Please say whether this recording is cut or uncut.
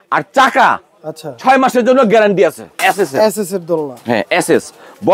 cut